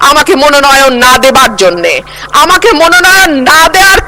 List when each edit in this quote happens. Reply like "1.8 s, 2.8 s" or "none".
none